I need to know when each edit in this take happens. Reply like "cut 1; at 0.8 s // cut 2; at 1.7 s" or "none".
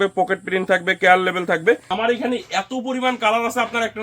cut 1; at 1.8 s